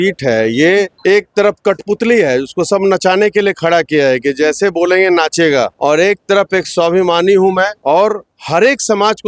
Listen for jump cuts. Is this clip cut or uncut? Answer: cut